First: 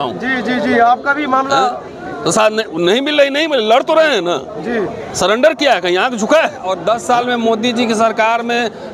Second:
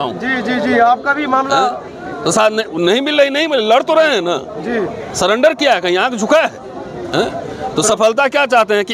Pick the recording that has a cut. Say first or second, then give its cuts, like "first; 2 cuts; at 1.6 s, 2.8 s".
first; 1 cut; at 6.7 s